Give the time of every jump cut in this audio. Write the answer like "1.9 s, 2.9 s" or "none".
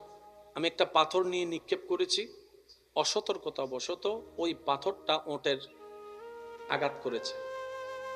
7.2 s

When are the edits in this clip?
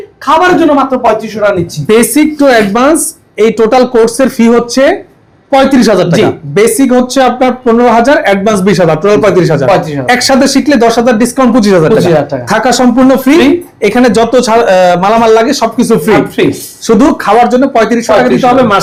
none

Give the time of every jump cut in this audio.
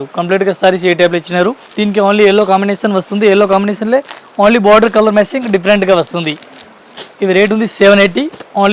none

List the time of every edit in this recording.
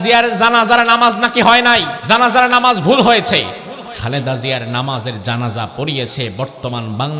1.9 s, 3.9 s

